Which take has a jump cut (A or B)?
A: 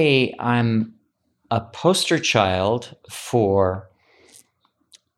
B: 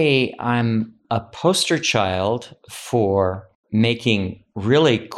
B